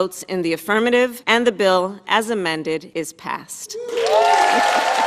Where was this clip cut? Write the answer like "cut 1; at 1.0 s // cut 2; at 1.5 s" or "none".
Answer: cut 1; at 1.2 s // cut 2; at 2.9 s